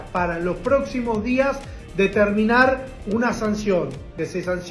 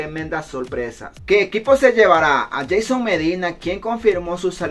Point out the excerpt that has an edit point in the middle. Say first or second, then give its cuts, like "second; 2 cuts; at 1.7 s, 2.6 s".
second; 1 cut; at 1.3 s